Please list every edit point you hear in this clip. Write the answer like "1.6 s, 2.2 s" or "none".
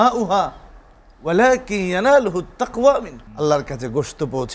3.2 s